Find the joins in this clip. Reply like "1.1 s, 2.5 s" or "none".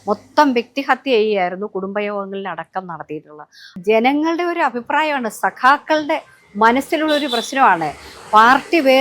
3.7 s